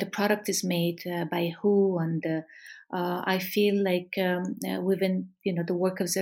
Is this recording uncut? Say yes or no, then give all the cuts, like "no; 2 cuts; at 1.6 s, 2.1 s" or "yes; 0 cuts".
yes; 0 cuts